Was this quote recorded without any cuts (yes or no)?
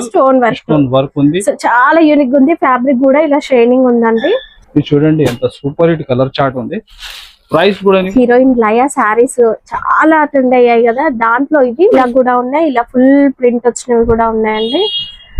no